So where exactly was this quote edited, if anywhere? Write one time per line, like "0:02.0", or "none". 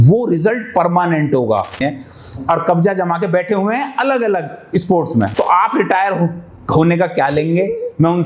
0:01.8
0:05.3